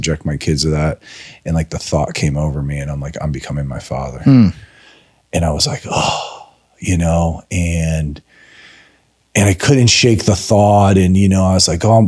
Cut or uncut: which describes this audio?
uncut